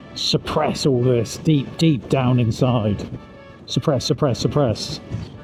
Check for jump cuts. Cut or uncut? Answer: uncut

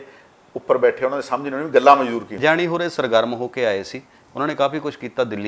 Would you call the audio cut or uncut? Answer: cut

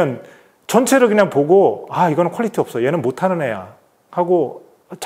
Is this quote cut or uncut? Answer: uncut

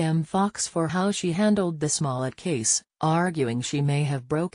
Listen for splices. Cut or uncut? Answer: cut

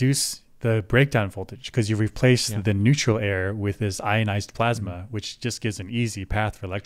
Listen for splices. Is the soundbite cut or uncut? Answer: uncut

